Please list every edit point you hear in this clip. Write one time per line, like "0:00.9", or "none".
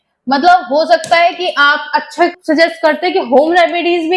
0:02.3